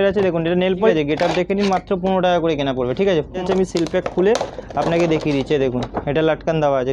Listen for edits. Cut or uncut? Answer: cut